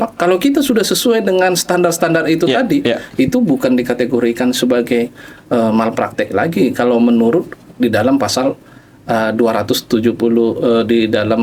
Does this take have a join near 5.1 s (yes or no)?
no